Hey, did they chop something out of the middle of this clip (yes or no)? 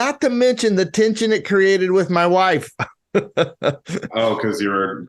no